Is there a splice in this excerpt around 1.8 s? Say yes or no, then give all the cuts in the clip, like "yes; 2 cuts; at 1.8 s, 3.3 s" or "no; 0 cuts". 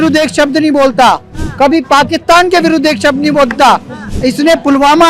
no; 0 cuts